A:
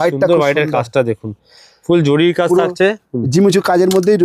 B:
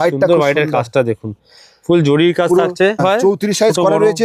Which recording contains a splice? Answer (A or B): B